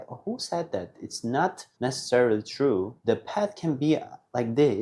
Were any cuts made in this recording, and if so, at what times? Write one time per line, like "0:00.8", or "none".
0:01.7
0:02.9